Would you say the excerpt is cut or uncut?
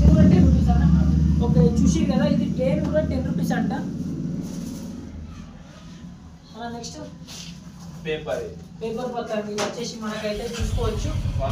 uncut